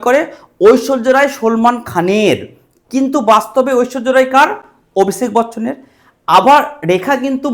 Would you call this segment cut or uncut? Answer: uncut